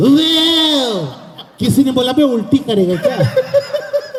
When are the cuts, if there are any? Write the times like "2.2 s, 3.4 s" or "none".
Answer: none